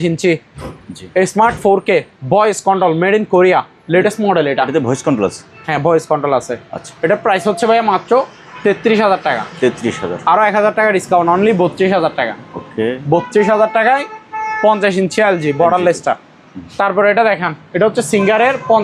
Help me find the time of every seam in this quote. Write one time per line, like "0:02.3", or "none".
none